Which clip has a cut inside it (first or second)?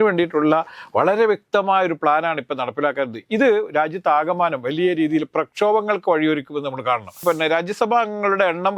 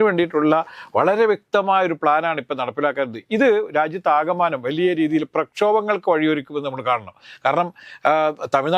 first